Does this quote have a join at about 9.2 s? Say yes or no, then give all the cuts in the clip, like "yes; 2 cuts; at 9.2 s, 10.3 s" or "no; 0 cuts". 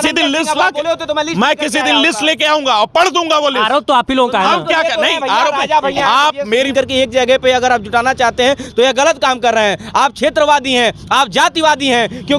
no; 1 cut; at 6.7 s